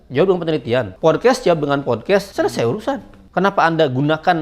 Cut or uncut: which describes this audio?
cut